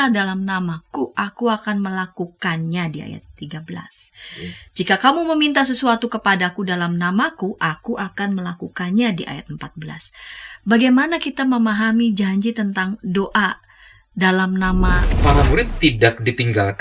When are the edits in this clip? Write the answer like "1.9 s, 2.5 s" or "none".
15.1 s

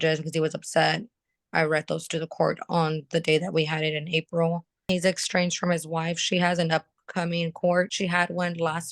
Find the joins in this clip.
4.9 s, 7.9 s

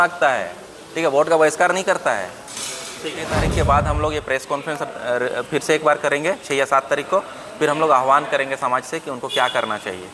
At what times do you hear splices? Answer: 3.3 s

